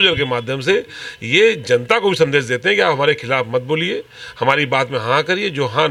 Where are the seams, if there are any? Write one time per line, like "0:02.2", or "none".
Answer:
none